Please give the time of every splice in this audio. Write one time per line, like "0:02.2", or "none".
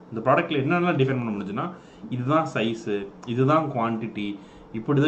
none